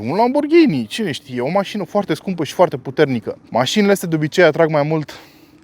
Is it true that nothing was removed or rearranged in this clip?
no; 1 cut; at 3.4 s

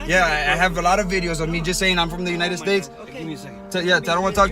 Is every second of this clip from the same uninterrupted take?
yes; 0 cuts

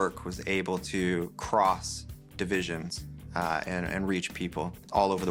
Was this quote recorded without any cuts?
yes; 0 cuts

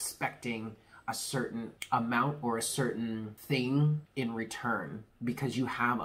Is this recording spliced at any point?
yes; 4 cuts; at 1.8 s, 3.3 s, 4.1 s, 5.0 s

